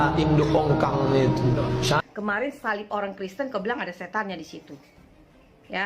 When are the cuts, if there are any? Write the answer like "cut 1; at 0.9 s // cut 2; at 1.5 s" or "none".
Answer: cut 1; at 2.0 s